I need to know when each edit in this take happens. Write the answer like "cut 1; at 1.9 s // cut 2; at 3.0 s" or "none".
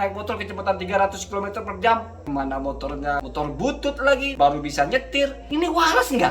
cut 1; at 2.1 s // cut 2; at 3.2 s // cut 3; at 4.3 s // cut 4; at 5.4 s